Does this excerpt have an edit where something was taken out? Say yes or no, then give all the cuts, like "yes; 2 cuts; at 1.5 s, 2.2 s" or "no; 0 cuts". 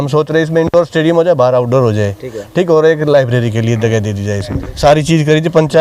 yes; 1 cut; at 4.6 s